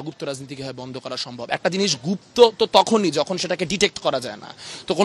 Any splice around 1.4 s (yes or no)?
no